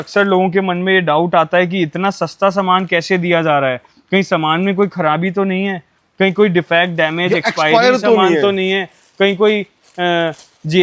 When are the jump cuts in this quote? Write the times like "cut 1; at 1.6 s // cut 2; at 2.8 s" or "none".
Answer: none